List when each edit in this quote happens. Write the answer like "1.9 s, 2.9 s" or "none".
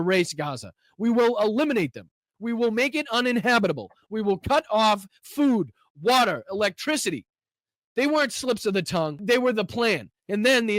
9.2 s